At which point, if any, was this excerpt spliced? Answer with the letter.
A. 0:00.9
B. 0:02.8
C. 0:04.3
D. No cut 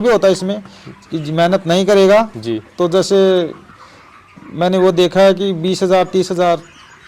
D